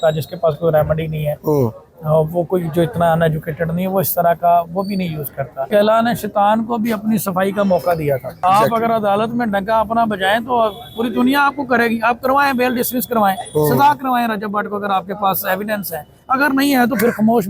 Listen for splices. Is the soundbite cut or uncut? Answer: cut